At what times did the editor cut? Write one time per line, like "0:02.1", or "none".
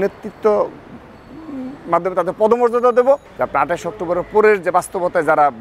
0:03.3